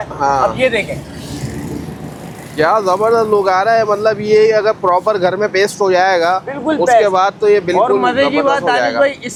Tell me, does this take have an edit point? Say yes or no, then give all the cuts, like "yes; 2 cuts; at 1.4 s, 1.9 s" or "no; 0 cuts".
no; 0 cuts